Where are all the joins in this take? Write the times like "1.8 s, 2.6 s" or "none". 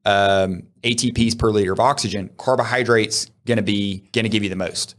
4.0 s